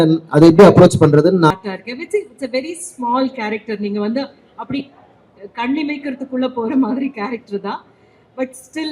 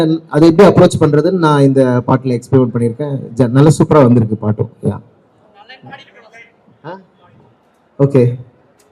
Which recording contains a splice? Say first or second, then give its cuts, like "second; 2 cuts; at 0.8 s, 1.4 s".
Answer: first; 1 cut; at 1.5 s